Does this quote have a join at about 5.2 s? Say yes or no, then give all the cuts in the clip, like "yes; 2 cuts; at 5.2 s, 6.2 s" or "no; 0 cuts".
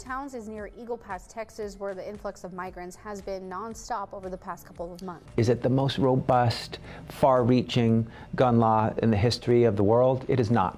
yes; 1 cut; at 5.2 s